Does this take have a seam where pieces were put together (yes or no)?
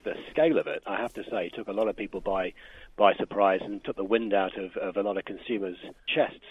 no